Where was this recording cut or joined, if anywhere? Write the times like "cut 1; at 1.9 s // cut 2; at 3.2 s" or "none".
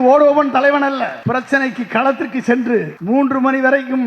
cut 1; at 1.2 s // cut 2; at 2.9 s